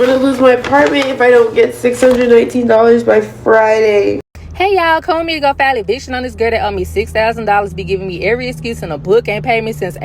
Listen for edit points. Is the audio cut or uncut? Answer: cut